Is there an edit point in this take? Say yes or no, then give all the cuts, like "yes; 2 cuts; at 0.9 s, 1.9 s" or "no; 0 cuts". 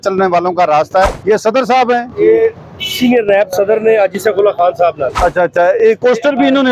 yes; 2 cuts; at 1.2 s, 5.1 s